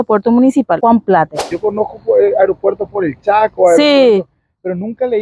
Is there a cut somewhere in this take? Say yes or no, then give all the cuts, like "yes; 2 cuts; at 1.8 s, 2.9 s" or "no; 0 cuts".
yes; 2 cuts; at 0.8 s, 1.4 s